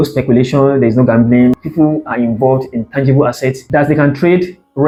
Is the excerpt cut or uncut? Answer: uncut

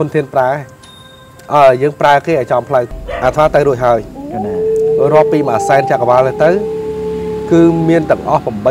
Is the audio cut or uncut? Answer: cut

